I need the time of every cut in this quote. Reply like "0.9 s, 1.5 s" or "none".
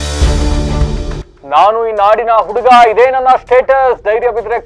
1.3 s